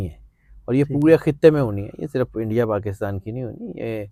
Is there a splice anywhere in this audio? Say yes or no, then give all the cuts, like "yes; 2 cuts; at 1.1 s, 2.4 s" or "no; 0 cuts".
no; 0 cuts